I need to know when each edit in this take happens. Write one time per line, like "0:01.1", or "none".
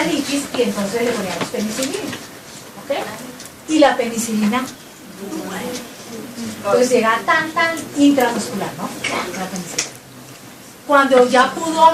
0:04.9